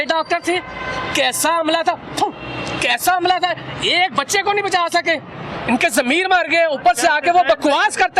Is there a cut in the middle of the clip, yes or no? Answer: yes